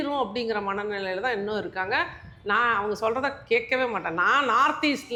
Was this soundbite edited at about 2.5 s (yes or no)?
no